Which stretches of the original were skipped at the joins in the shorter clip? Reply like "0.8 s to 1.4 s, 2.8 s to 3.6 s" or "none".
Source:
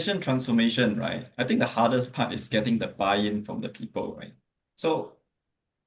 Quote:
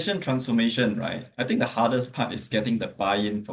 none